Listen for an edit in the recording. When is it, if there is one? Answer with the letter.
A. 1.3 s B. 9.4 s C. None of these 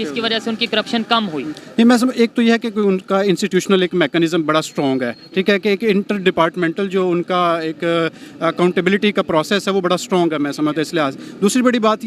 C